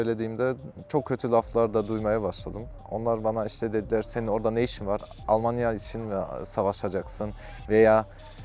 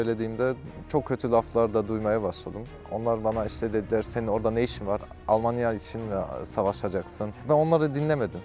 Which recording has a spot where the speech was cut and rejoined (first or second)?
second